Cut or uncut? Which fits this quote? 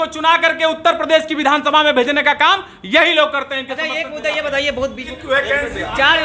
cut